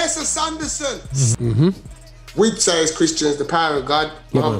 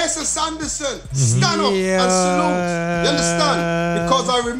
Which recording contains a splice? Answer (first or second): first